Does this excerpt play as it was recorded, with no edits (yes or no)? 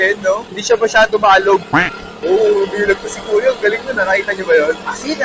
yes